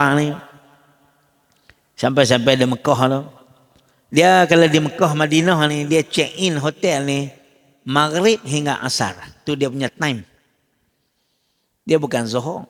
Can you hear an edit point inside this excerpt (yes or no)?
no